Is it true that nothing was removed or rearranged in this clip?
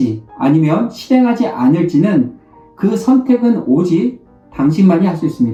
yes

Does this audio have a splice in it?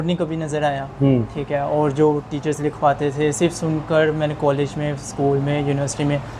no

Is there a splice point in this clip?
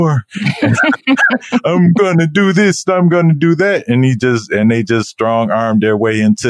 no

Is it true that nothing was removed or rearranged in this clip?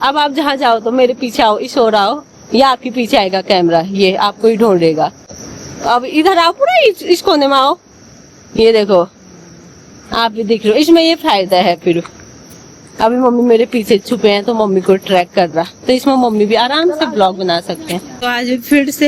yes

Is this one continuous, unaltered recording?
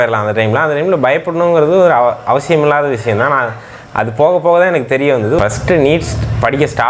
yes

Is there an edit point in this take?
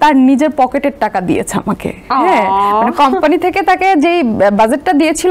no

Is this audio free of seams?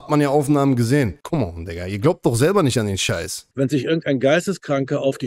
no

